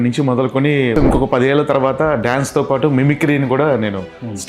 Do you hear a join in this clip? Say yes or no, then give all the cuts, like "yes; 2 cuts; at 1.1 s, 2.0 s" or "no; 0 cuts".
yes; 1 cut; at 0.9 s